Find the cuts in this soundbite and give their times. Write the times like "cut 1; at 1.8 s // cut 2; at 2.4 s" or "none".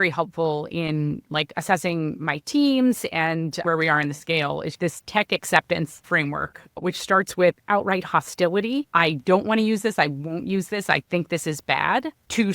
cut 1; at 3.6 s // cut 2; at 4.7 s // cut 3; at 6.0 s // cut 4; at 8.9 s